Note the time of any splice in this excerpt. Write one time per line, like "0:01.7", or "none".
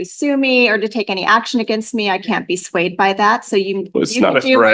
none